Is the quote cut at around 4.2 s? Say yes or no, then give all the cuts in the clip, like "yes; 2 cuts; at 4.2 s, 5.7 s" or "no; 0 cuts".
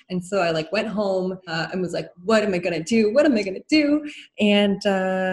yes; 2 cuts; at 1.6 s, 4.2 s